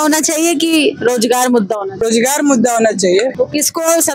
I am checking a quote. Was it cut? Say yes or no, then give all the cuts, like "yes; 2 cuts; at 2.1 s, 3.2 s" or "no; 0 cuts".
yes; 2 cuts; at 1.9 s, 3.3 s